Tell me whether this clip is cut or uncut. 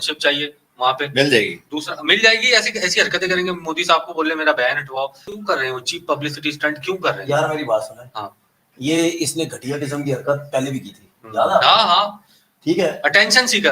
uncut